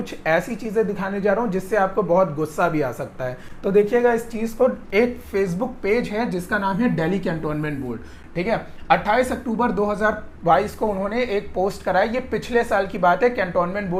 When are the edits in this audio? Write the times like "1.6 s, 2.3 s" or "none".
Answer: none